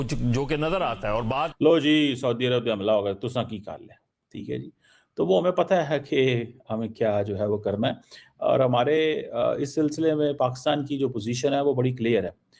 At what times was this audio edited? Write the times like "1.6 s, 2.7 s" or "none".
1.5 s